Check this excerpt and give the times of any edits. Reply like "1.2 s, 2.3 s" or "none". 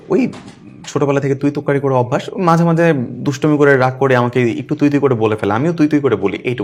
none